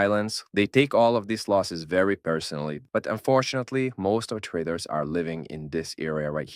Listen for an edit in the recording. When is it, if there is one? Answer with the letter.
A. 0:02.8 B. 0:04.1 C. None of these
A